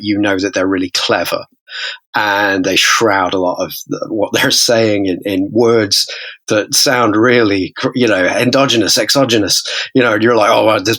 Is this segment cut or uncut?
uncut